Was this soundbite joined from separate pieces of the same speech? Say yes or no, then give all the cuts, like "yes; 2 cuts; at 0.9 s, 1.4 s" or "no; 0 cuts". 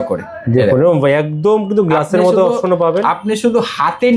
no; 0 cuts